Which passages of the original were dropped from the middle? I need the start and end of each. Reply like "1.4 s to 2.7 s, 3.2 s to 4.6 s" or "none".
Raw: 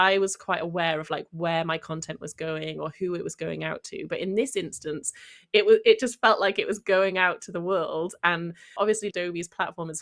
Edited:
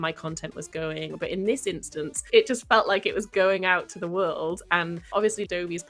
2.8 s to 4.0 s, 5.2 s to 5.8 s, 8.5 s to 8.6 s